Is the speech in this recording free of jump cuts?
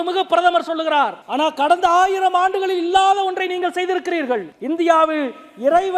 no; 2 cuts; at 1.2 s, 4.5 s

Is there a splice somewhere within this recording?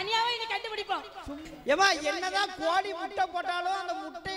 yes; 1 cut; at 1.4 s

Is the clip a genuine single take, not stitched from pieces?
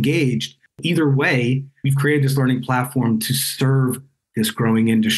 yes; 0 cuts

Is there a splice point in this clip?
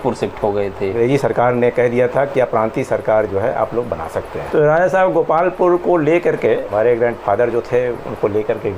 yes; 3 cuts; at 0.9 s, 4.3 s, 6.7 s

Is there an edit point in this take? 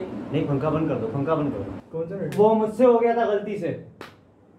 yes; 1 cut; at 1.8 s

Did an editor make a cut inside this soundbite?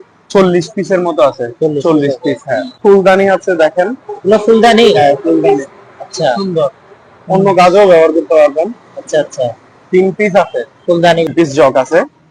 yes; 2 cuts; at 2.7 s, 11.3 s

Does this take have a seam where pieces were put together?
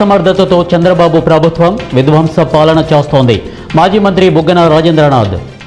no; 0 cuts

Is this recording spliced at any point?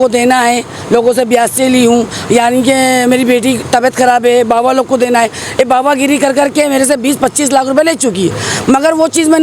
no; 0 cuts

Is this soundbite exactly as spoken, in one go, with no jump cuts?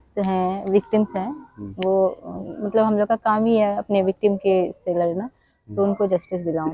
yes; 0 cuts

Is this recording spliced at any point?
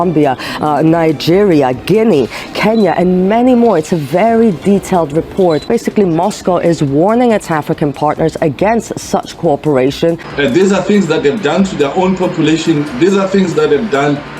yes; 2 cuts; at 5.6 s, 10.3 s

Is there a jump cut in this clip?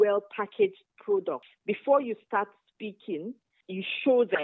yes; 2 cuts; at 1.5 s, 3.5 s

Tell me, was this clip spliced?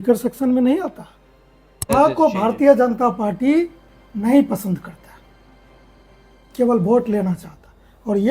yes; 1 cut; at 1.9 s

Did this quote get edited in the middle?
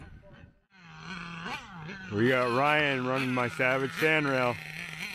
yes; 1 cut; at 0.9 s

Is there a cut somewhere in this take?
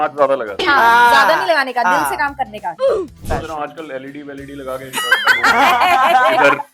yes; 1 cut; at 3.0 s

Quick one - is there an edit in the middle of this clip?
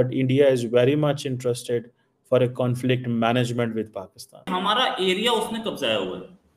yes; 1 cut; at 4.5 s

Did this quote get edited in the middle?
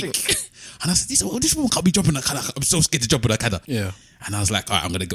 yes; 1 cut; at 3.6 s

